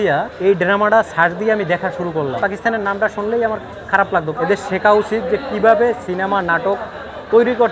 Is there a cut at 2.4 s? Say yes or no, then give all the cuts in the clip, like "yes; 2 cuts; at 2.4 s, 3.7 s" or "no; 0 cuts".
yes; 2 cuts; at 2.4 s, 4.3 s